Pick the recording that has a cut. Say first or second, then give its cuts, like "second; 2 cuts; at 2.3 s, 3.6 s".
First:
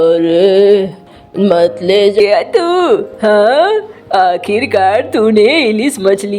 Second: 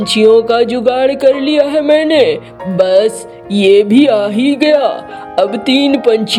first; 1 cut; at 2.2 s